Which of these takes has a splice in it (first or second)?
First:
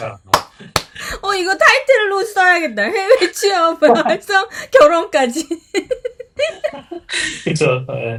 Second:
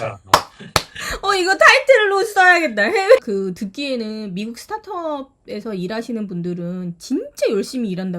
second